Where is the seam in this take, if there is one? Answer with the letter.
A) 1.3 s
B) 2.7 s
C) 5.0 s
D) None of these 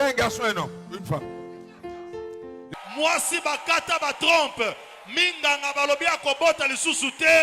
B